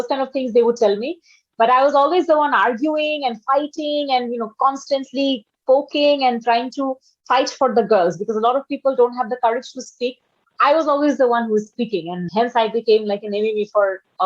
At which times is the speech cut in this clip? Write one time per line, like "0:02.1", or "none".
0:12.2